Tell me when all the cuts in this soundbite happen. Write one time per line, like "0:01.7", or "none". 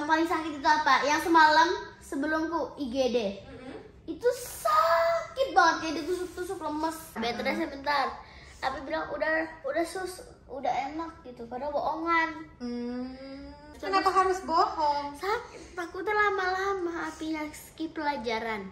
0:07.1
0:13.8